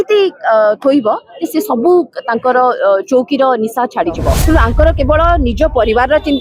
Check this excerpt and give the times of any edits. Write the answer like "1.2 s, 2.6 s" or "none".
4.3 s